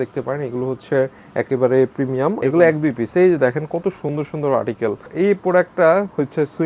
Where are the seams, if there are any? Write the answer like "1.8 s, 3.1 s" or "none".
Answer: 2.4 s, 5.1 s